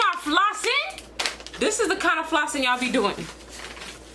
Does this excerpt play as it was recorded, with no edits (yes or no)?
no